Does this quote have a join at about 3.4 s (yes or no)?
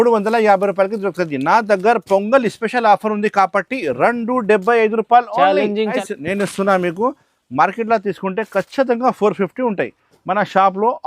no